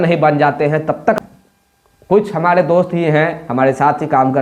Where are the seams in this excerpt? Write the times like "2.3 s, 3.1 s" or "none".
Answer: 1.2 s